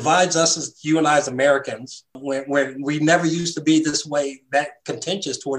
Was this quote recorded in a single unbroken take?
yes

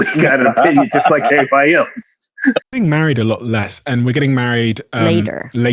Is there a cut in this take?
yes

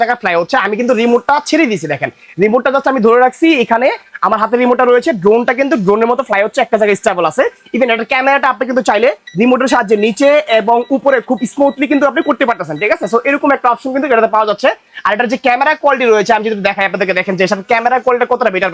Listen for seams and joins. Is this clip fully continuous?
yes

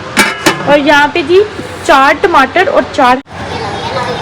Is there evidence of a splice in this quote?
yes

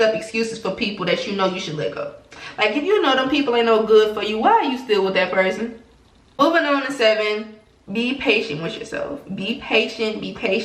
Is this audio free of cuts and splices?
yes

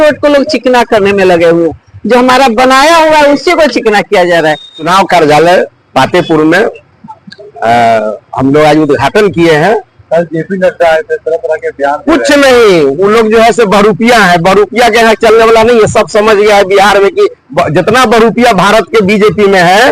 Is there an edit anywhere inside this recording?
yes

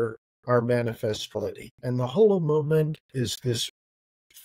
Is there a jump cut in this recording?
yes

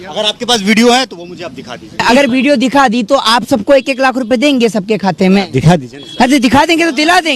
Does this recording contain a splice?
yes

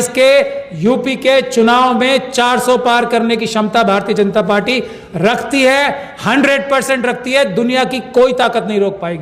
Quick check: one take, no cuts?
yes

